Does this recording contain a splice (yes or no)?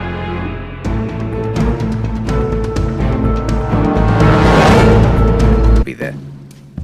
no